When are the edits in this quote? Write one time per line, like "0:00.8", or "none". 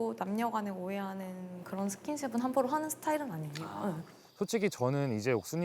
0:04.2